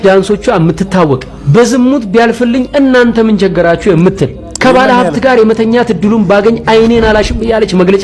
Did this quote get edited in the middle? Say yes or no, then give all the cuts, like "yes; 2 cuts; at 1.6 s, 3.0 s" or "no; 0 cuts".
no; 0 cuts